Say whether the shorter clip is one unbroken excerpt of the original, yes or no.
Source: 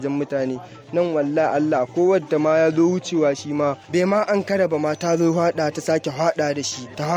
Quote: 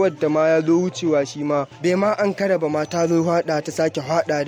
yes